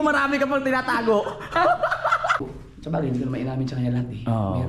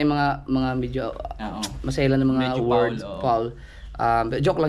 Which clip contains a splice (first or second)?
first